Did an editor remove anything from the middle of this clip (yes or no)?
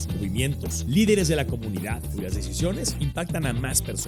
no